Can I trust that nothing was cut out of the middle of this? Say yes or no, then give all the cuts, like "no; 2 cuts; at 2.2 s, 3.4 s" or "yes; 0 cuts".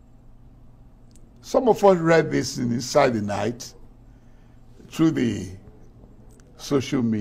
yes; 0 cuts